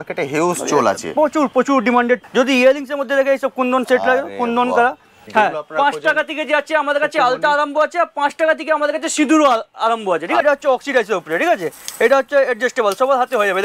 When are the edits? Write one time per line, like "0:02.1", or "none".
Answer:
0:02.2
0:05.2
0:10.4